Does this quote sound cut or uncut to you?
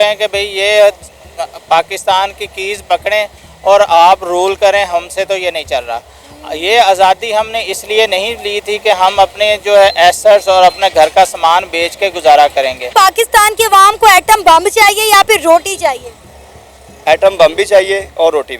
cut